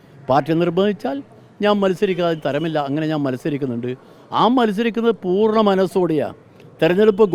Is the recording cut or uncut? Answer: uncut